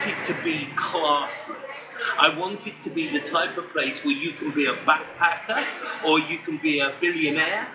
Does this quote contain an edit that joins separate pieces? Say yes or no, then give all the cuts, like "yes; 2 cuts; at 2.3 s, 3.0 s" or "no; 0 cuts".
no; 0 cuts